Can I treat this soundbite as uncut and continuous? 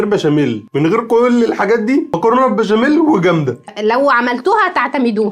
yes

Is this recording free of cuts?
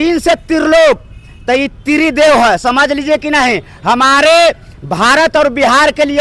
yes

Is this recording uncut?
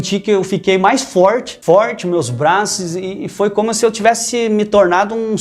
no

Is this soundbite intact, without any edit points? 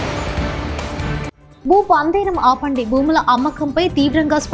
yes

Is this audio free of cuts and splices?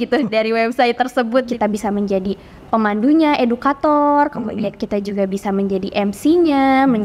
no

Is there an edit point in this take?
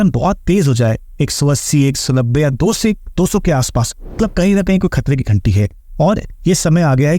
yes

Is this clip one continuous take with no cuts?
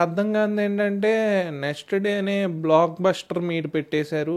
yes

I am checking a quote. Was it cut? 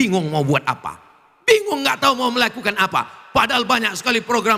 no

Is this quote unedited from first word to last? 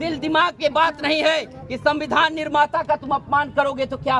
yes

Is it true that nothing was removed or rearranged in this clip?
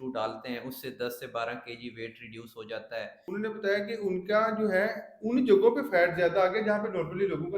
no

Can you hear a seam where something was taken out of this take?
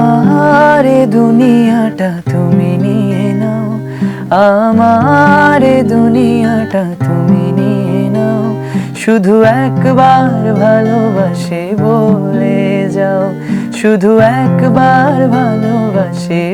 no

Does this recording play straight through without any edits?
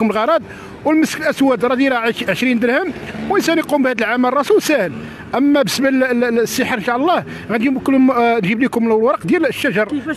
yes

